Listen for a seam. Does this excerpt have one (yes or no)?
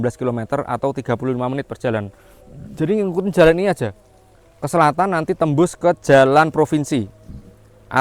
no